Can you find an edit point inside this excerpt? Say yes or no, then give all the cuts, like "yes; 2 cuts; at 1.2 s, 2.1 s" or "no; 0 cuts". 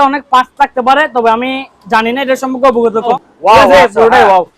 yes; 1 cut; at 3.3 s